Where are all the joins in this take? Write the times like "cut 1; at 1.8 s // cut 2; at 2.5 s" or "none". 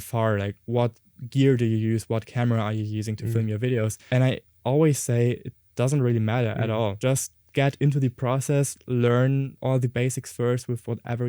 cut 1; at 4.0 s // cut 2; at 7.0 s // cut 3; at 9.5 s